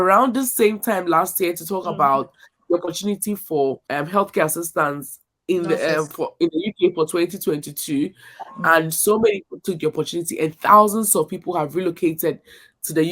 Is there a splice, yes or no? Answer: yes